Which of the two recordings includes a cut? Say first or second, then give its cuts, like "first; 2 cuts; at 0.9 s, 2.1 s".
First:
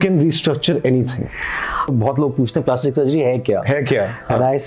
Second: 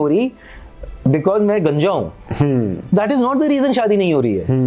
first; 1 cut; at 1.9 s